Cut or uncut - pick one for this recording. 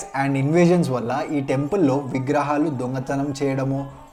uncut